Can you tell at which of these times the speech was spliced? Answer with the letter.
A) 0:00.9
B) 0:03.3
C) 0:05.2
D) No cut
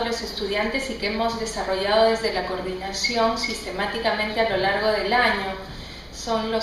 B